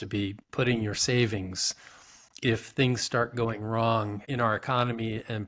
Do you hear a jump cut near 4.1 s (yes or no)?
yes